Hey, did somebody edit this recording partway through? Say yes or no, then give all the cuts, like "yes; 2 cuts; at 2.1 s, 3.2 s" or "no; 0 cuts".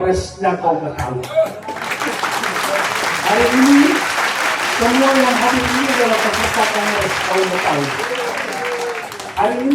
no; 0 cuts